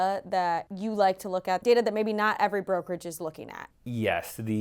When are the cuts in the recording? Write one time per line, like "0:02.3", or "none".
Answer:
0:01.6
0:03.7